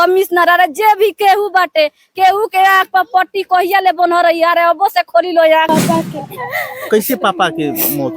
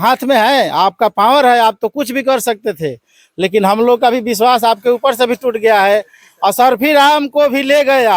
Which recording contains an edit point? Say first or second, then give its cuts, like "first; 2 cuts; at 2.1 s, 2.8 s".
first; 1 cut; at 5.7 s